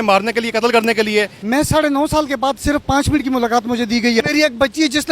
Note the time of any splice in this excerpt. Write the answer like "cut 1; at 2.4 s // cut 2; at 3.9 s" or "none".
cut 1; at 1.4 s // cut 2; at 4.2 s